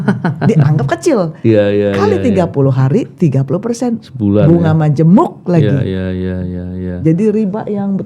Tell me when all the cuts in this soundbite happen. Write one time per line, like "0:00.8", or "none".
none